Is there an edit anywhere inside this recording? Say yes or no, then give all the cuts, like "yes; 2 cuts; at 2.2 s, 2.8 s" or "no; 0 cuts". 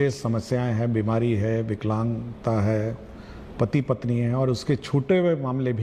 no; 0 cuts